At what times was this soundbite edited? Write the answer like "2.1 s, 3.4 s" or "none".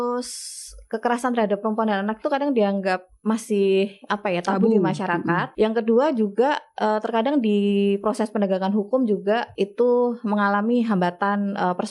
5.5 s, 9.5 s